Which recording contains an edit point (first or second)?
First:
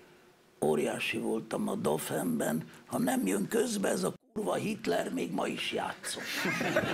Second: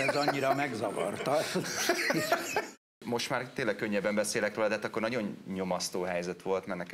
second